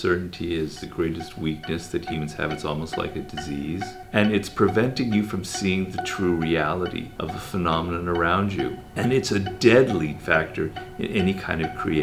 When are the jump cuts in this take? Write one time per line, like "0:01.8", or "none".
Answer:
0:00.8
0:02.1
0:03.9
0:07.1
0:10.2